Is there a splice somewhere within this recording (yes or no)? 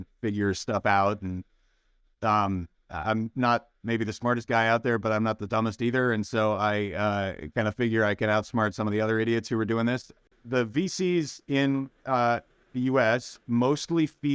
yes